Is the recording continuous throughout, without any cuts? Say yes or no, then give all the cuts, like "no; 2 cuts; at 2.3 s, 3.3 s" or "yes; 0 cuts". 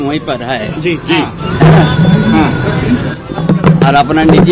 yes; 0 cuts